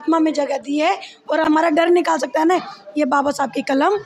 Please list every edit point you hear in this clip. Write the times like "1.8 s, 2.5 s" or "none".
1.5 s